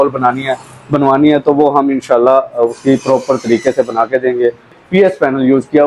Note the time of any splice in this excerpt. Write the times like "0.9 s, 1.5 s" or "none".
4.8 s